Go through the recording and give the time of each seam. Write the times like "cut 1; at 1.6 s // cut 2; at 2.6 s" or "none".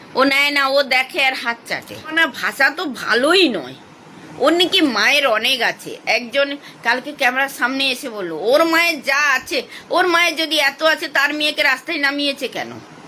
cut 1; at 2.1 s